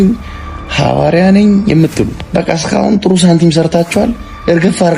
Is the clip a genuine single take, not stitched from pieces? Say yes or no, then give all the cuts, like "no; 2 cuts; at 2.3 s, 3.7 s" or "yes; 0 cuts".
no; 1 cut; at 2.2 s